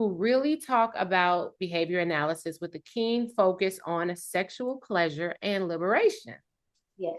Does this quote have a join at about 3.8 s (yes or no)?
no